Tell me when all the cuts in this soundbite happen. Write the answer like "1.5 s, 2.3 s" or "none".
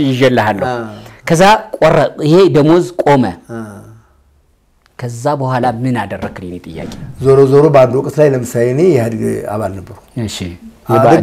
6.9 s